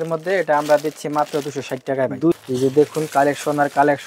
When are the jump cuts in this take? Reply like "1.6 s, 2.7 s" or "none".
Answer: 2.4 s